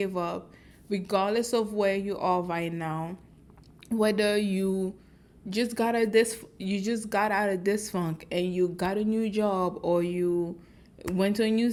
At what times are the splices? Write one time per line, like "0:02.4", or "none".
none